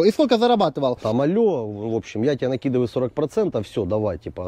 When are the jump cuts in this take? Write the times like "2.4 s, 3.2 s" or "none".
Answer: 1.0 s